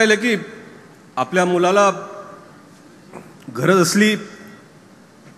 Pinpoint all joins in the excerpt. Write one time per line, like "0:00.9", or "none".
none